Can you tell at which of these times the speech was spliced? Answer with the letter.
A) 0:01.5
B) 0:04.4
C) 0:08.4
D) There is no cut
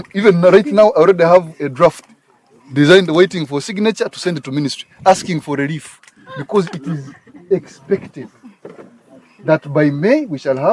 D